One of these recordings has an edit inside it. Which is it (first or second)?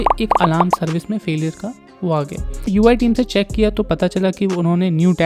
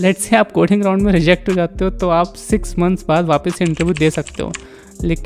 first